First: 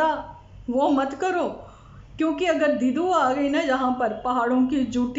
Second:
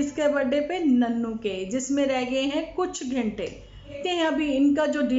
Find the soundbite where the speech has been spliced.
second; 1 cut; at 4.0 s

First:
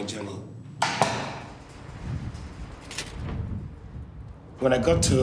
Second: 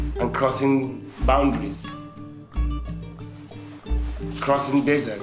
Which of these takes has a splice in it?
second; 1 cut; at 3.5 s

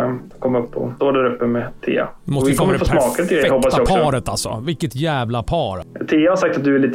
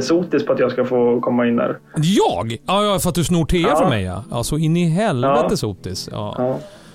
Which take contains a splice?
first; 2 cuts; at 0.9 s, 5.8 s

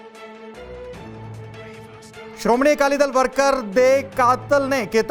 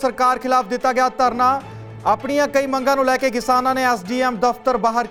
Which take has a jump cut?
first; 1 cut; at 2.4 s

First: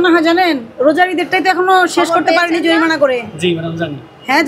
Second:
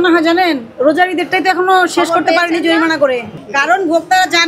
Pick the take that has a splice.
second; 1 cut; at 3.3 s

